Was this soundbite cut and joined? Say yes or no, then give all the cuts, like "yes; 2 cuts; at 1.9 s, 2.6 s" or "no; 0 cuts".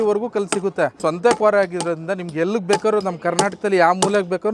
yes; 1 cut; at 1.0 s